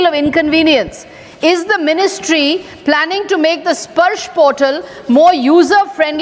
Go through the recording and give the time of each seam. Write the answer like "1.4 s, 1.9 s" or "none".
none